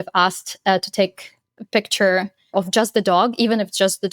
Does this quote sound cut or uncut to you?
cut